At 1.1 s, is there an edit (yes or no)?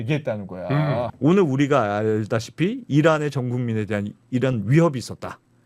yes